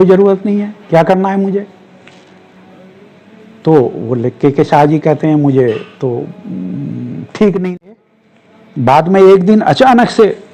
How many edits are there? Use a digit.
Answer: 1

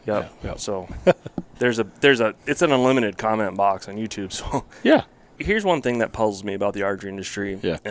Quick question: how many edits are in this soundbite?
1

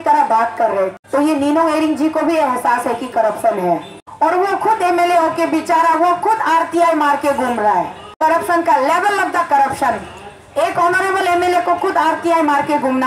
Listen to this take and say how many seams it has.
3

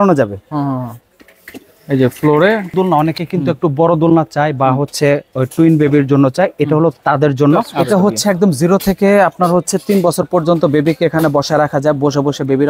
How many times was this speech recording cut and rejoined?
2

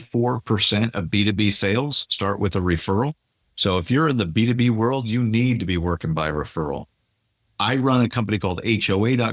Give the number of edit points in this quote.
0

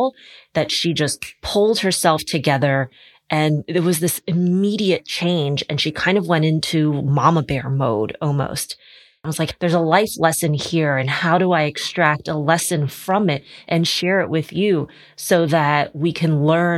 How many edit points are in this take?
1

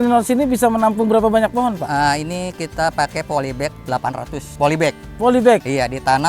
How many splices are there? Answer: 1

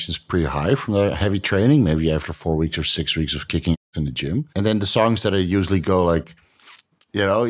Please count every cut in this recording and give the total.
1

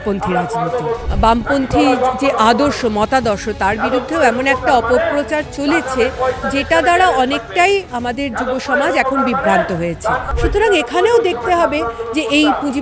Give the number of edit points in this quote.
2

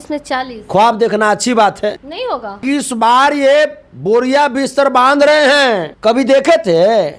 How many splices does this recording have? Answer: 2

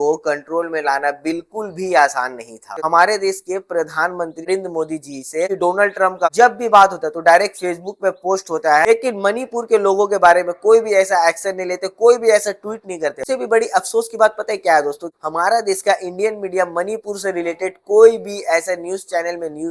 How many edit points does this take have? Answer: 3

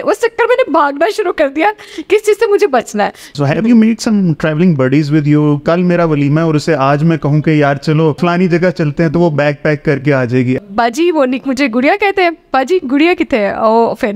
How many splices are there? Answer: 4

